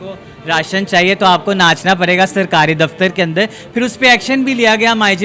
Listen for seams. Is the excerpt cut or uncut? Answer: uncut